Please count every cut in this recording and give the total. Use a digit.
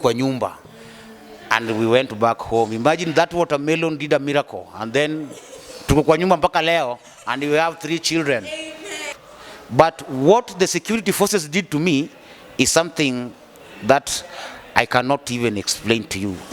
1